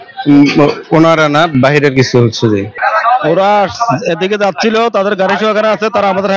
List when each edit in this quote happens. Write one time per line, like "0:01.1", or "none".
0:02.7

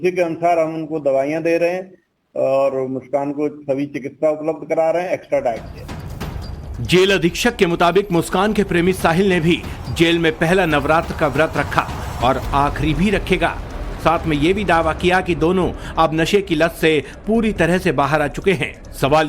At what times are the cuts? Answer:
0:14.6

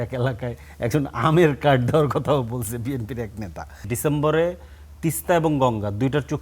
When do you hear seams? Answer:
0:03.9

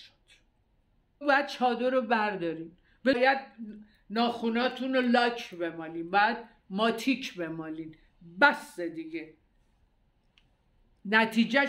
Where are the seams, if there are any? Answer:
0:01.2
0:03.2

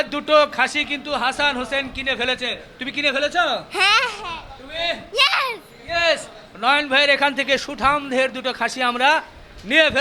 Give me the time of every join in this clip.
none

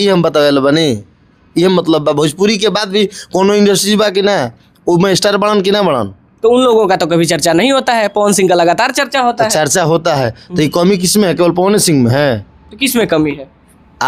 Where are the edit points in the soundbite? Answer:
none

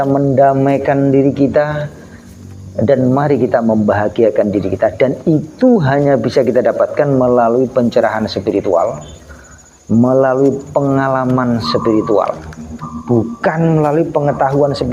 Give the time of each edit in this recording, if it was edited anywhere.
none

